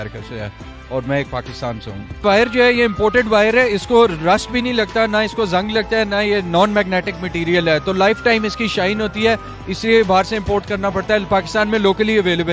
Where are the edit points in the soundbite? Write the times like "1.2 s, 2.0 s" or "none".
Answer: 2.2 s

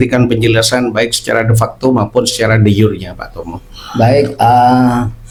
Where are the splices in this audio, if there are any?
none

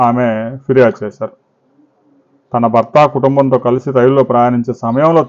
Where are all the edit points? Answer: none

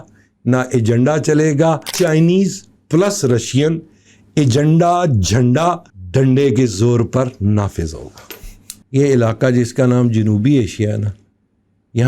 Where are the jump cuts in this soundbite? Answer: 1.9 s, 5.9 s, 8.7 s

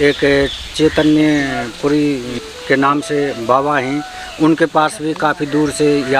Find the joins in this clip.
2.5 s

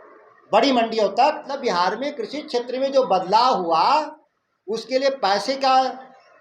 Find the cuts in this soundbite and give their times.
1.5 s

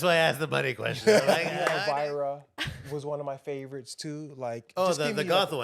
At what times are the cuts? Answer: 1.8 s

